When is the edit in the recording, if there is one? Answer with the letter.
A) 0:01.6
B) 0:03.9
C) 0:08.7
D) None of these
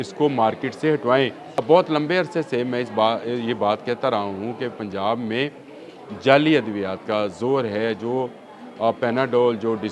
A